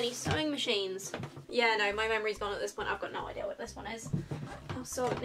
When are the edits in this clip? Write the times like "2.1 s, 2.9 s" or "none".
none